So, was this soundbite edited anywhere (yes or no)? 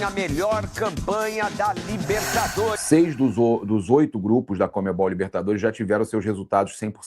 yes